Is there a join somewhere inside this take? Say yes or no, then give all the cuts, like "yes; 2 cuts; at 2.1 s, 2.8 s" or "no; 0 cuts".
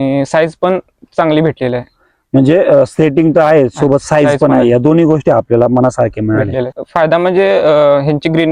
yes; 1 cut; at 6.8 s